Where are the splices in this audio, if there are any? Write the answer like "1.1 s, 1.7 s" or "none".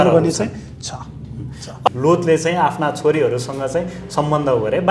1.9 s